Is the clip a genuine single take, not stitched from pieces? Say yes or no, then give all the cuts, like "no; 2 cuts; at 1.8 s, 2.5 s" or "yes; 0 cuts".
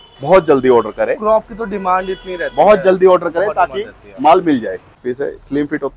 no; 1 cut; at 5.0 s